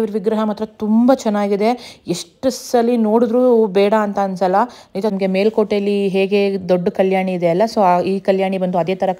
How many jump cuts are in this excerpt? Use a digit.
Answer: 1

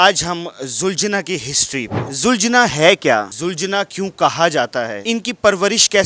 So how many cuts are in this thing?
3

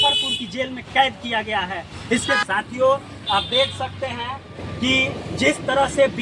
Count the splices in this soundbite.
1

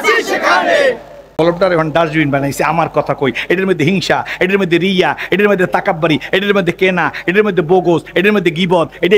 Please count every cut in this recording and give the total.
1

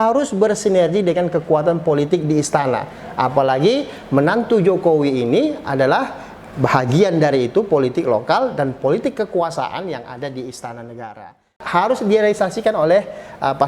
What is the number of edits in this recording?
1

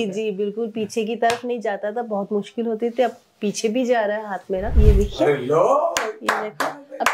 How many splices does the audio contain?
1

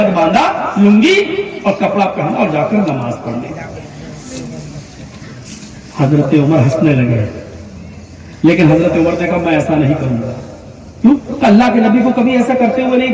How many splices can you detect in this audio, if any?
0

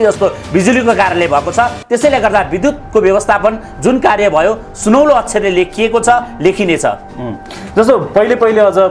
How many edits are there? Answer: 0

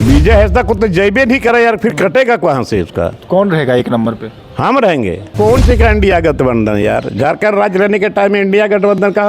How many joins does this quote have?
1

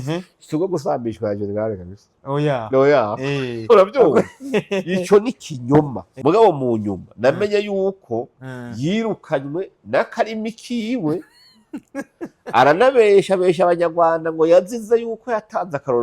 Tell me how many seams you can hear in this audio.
1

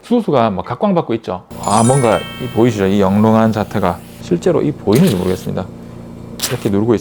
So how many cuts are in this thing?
1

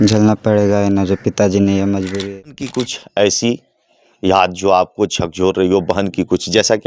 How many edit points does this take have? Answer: 1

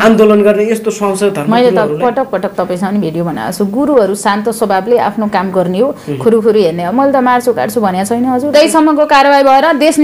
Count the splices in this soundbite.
1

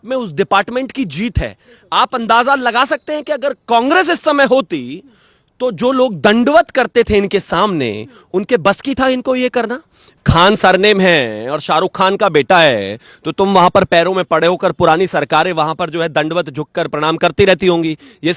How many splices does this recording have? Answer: 1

